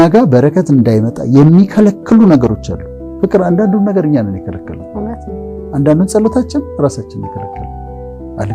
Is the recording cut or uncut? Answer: uncut